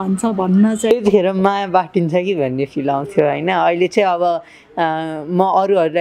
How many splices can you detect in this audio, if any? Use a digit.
1